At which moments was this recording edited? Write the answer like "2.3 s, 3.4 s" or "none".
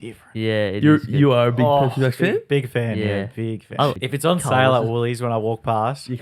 4.0 s